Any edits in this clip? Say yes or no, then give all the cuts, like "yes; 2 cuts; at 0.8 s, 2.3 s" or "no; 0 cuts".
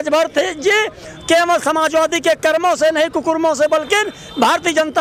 no; 0 cuts